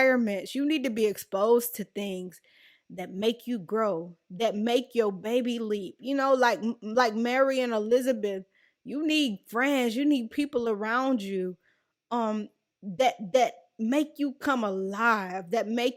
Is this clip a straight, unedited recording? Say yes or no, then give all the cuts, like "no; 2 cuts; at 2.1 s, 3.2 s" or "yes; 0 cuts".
yes; 0 cuts